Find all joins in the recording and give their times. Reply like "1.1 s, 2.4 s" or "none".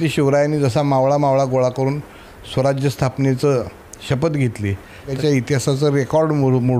5.2 s